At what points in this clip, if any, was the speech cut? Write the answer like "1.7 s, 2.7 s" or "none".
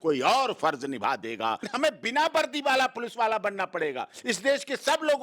1.7 s